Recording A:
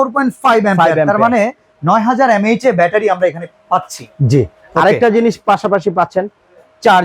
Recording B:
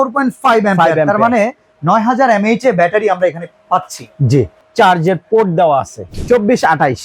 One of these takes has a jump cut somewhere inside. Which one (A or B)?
B